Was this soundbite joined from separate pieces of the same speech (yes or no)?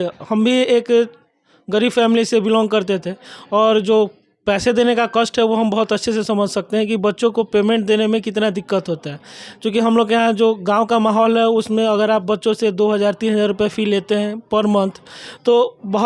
no